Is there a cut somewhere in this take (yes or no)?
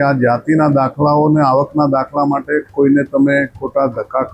no